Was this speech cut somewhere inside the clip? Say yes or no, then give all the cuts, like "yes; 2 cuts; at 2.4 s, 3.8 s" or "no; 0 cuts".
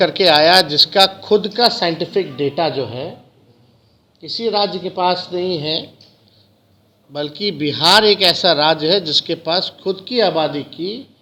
no; 0 cuts